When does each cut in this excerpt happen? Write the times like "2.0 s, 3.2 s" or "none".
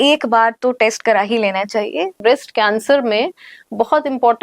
2.2 s

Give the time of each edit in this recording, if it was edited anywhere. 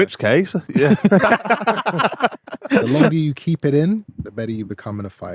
1.2 s, 3.1 s, 4.1 s

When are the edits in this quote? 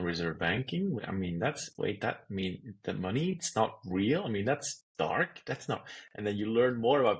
1.0 s

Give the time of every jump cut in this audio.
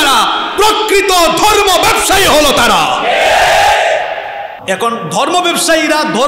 none

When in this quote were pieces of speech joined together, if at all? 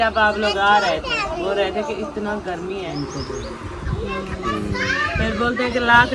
2.9 s

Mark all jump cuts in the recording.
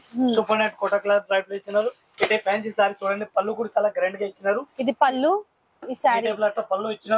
2.0 s

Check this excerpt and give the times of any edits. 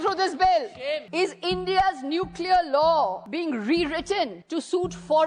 1.1 s, 3.2 s, 4.4 s

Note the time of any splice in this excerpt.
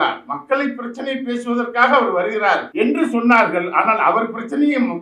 2.7 s

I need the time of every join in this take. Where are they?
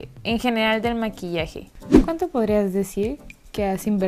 1.4 s

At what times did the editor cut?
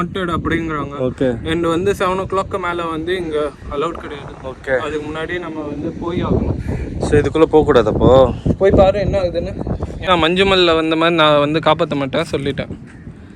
10.1 s

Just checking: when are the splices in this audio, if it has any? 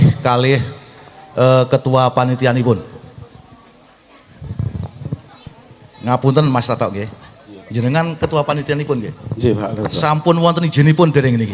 5.3 s

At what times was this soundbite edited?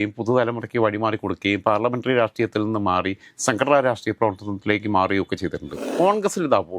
5.9 s

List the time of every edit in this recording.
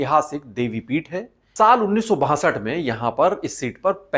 1.4 s

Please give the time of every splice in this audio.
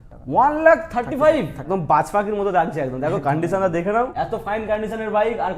1.6 s, 4.1 s

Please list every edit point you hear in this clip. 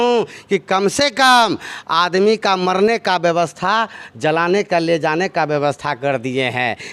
none

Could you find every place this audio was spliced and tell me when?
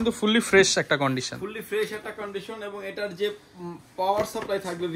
none

